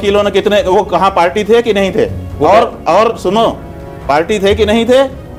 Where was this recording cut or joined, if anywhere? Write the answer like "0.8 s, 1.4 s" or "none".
none